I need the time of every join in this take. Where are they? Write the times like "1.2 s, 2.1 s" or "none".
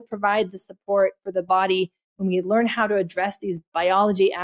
none